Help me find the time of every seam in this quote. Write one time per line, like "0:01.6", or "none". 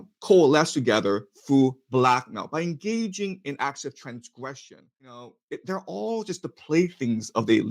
0:05.2